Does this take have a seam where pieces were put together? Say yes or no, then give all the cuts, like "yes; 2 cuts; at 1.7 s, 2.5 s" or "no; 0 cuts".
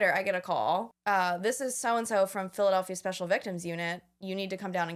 no; 0 cuts